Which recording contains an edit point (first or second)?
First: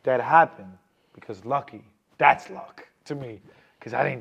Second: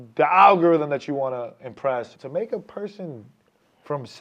second